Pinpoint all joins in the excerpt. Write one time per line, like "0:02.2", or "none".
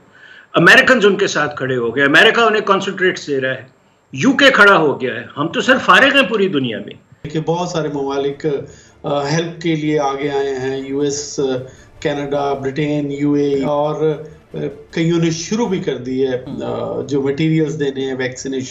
0:07.3
0:13.7